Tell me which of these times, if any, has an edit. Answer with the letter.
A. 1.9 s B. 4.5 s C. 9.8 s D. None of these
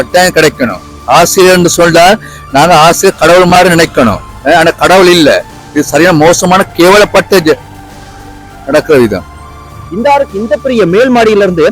C